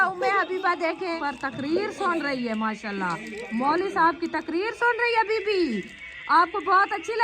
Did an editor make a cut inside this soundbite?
yes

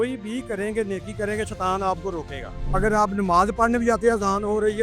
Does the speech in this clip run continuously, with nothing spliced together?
no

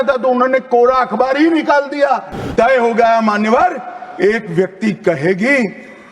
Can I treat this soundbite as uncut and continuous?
no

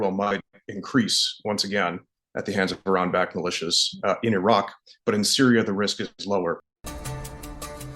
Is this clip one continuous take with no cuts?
no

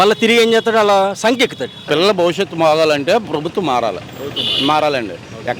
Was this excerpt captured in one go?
no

